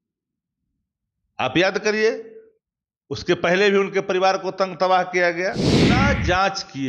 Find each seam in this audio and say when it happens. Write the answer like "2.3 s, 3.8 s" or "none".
6.0 s